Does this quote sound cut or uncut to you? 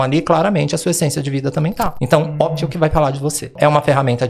cut